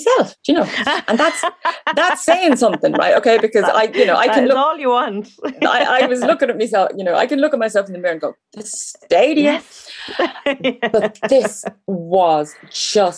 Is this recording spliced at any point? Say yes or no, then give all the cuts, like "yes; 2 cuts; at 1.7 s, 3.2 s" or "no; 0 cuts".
no; 0 cuts